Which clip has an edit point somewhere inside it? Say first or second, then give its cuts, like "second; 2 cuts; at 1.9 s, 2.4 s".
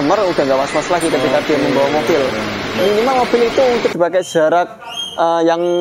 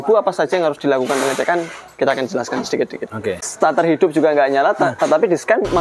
second; 1 cut; at 3.5 s